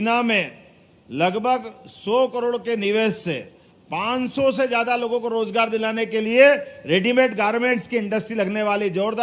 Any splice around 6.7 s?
no; 0 cuts

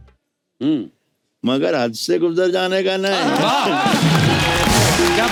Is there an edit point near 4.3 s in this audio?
no; 0 cuts

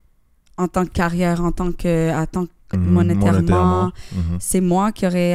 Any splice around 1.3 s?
no; 1 cut; at 2.7 s

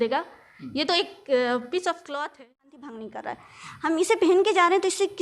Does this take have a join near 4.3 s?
no; 1 cut; at 2.2 s

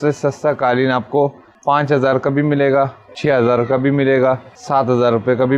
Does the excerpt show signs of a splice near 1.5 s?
yes; 3 cuts; at 1.5 s, 3.0 s, 4.5 s

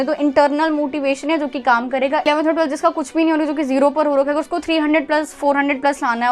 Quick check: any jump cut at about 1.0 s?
no; 1 cut; at 2.2 s

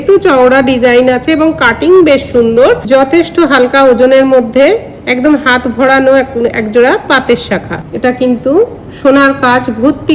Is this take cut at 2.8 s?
yes; 2 cuts; at 2.8 s, 7.8 s

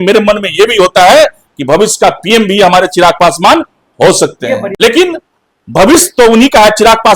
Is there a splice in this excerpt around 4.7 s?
yes; 1 cut; at 4.7 s

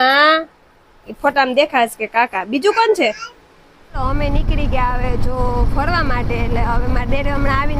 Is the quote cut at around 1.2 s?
no; 1 cut; at 4.0 s

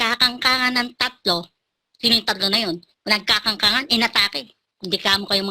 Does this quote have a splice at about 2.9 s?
yes; 1 cut; at 2.9 s

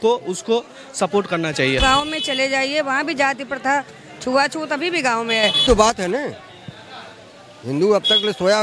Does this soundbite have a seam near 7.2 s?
no; 2 cuts; at 1.8 s, 5.7 s

